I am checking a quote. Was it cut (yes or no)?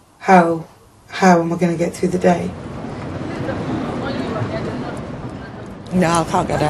no